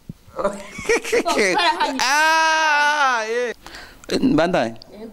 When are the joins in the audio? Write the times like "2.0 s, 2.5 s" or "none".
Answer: 3.6 s